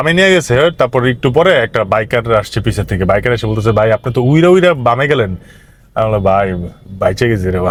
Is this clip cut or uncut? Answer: uncut